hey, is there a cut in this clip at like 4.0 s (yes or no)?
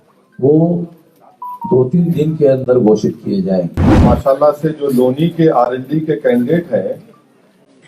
yes